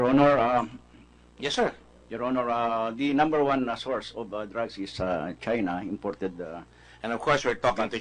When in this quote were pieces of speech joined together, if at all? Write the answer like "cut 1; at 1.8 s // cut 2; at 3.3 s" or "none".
none